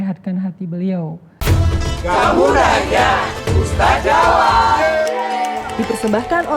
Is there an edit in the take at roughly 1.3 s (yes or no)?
yes